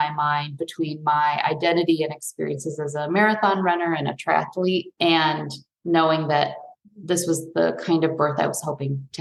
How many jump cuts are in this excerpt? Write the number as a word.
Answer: zero